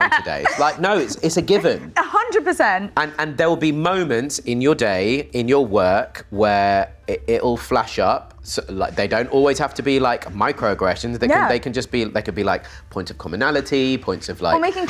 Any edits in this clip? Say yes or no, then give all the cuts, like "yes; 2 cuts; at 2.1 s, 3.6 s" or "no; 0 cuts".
no; 0 cuts